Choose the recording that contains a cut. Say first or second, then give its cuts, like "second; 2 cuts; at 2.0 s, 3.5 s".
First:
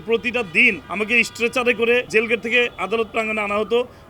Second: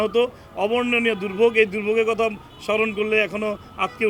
first; 2 cuts; at 0.8 s, 2.1 s